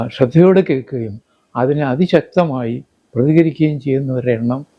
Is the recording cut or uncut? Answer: uncut